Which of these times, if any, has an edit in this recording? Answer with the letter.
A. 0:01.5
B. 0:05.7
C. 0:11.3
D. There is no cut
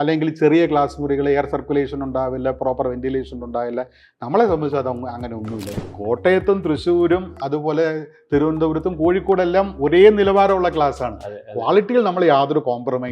B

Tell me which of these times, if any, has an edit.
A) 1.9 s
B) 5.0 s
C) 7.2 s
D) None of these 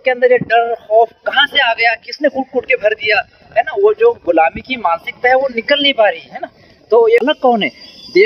C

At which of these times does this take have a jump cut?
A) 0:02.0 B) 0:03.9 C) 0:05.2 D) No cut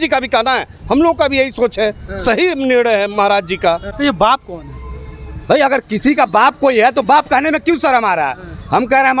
B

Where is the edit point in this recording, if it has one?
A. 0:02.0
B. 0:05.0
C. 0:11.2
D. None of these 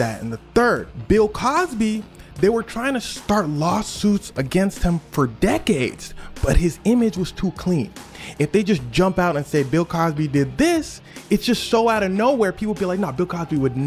D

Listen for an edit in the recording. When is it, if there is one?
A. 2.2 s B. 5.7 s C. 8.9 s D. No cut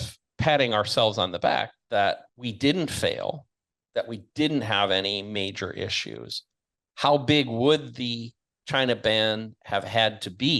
A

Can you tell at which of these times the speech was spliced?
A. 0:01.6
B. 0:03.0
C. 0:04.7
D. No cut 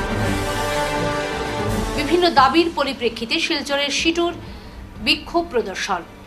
A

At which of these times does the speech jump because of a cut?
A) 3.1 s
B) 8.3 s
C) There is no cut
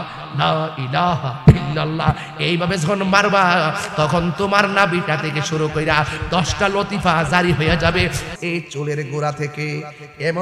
B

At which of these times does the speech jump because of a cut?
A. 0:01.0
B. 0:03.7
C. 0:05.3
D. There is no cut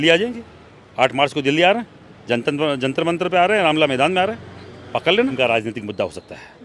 C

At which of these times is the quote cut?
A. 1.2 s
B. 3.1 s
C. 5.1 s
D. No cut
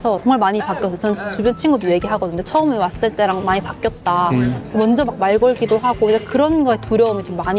D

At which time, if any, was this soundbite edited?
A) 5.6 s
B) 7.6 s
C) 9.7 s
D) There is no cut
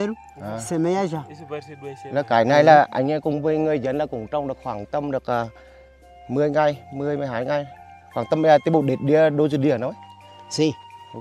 D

